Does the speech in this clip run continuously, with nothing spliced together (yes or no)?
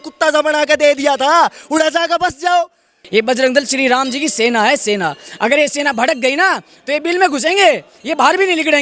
no